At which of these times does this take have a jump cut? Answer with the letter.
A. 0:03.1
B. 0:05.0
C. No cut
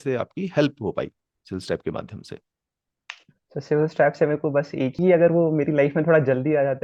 B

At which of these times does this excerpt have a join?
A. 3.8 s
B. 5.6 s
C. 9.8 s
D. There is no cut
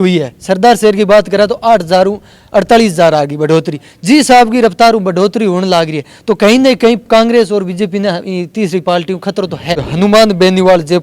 C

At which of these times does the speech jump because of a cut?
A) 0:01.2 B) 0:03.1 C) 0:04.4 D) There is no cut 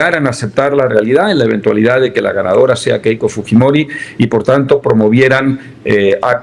D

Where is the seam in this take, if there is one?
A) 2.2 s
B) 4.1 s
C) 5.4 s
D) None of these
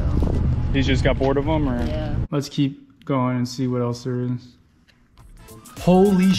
A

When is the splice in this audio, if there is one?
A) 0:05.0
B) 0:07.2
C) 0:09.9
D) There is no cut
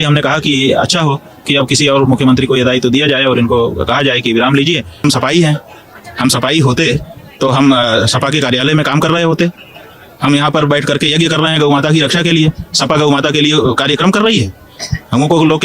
A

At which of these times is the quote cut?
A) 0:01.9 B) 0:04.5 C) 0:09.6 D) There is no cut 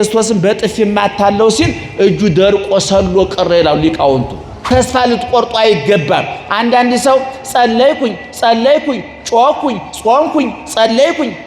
B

